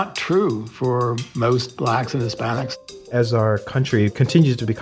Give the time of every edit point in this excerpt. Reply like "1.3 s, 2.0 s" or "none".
1.5 s, 2.9 s